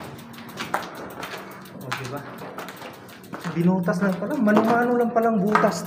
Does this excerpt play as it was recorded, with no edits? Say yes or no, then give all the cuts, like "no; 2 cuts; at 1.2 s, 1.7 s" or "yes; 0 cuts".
yes; 0 cuts